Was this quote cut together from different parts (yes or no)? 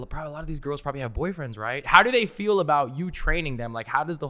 no